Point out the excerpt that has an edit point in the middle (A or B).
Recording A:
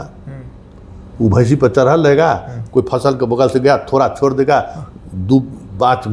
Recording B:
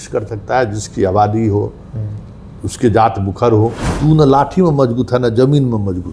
B